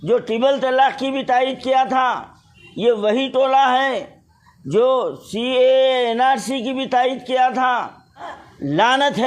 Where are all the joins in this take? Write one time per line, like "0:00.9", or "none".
0:08.3